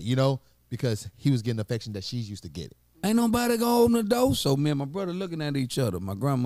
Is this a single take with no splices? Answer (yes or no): no